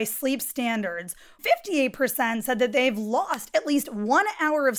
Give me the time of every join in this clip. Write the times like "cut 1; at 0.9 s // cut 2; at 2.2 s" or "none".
cut 1; at 1.4 s